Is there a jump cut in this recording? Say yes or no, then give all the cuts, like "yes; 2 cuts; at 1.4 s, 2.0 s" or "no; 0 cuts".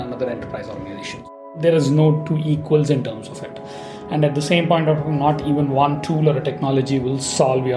yes; 1 cut; at 1.5 s